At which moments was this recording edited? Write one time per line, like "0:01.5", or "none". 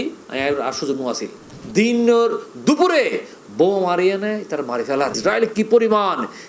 0:01.5
0:05.1